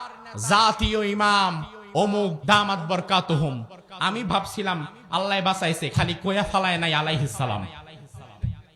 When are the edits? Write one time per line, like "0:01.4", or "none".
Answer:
0:02.4

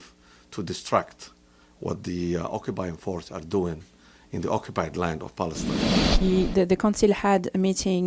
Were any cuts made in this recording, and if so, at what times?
0:06.0

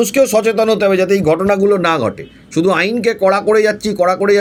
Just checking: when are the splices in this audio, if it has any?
none

